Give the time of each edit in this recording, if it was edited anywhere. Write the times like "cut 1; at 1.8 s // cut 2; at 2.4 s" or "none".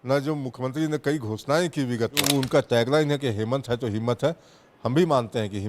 cut 1; at 2.2 s

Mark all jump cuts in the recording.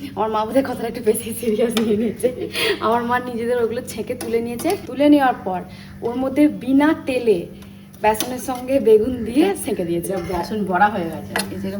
none

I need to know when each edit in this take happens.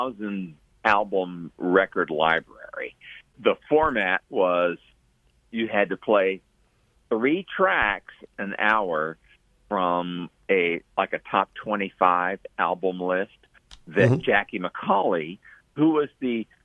cut 1; at 3.4 s

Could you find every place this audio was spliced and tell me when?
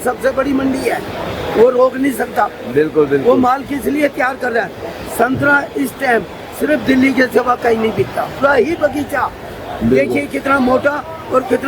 cut 1; at 8.3 s

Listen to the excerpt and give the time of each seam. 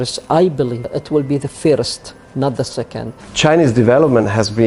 none

